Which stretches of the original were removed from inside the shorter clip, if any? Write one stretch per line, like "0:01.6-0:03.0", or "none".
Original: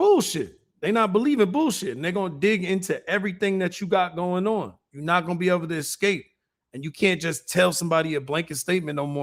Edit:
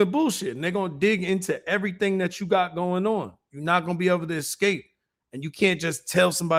none

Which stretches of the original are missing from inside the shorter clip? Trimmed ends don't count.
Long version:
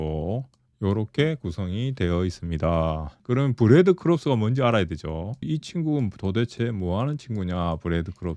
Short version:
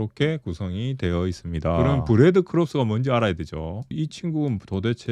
0:02.8-0:03.4

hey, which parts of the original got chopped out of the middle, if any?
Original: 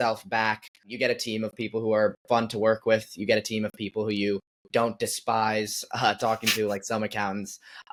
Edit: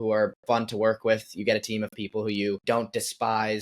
0:04.4-0:04.7

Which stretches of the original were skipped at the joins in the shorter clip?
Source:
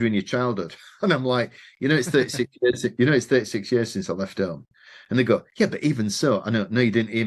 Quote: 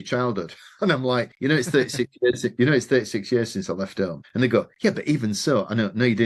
0:01.5-0:01.7
0:04.6-0:05.0

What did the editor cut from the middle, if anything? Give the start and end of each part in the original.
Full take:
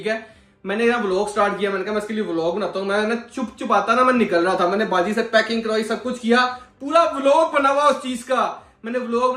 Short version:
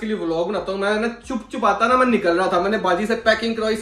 none

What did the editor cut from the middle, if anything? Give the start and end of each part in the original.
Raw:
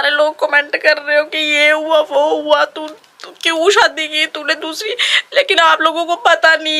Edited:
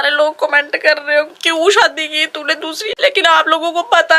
0:01.4-0:03.4
0:04.9-0:05.2

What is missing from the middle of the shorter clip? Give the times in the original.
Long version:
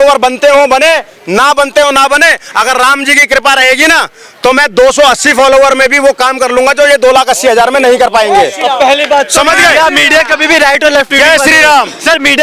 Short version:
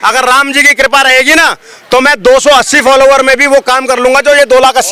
none

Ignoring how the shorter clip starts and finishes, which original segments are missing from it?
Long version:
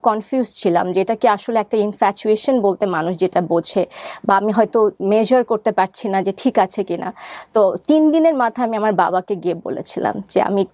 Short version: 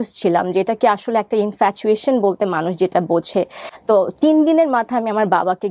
0:04.1-0:07.3

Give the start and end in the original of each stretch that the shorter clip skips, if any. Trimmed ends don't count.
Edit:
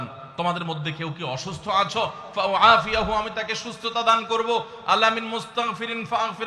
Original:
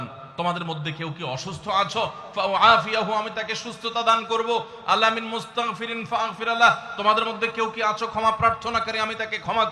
none

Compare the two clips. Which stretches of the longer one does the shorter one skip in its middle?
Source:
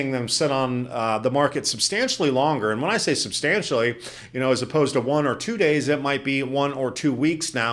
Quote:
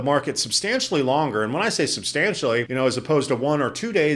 0:04.0-0:04.3

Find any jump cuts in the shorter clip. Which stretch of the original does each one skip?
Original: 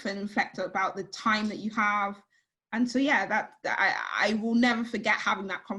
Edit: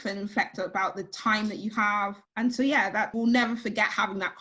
0:02.2-0:02.6
0:03.5-0:04.4

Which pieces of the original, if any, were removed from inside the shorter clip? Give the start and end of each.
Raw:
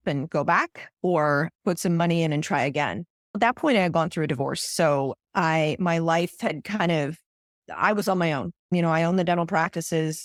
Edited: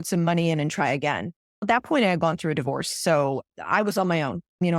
0:05.2-0:07.6

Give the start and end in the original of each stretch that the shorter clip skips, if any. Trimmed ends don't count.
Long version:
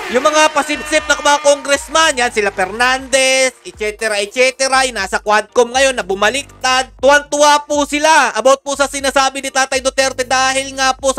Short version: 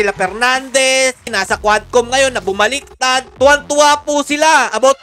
0:03.7-0:04.9

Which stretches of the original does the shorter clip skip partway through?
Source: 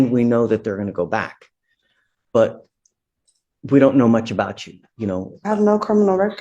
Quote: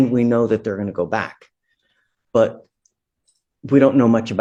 none

